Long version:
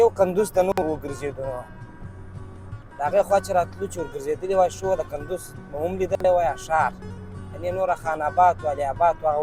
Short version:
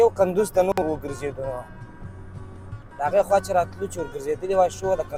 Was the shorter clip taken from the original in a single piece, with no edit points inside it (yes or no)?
yes